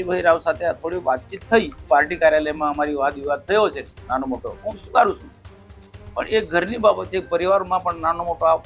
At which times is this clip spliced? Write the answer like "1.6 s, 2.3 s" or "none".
1.8 s